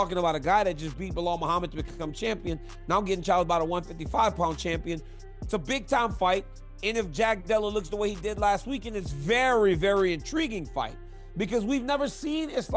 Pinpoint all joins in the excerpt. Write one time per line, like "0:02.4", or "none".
0:05.1